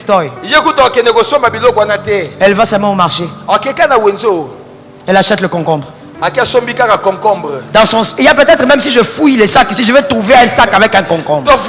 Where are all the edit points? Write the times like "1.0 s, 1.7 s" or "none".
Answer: 7.5 s